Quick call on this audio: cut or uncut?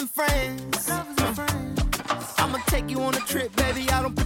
uncut